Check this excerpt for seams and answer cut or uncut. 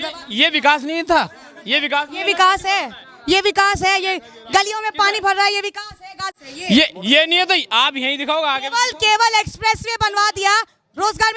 uncut